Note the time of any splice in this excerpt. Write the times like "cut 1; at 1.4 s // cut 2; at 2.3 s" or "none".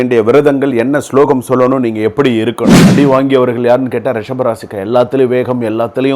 cut 1; at 2.8 s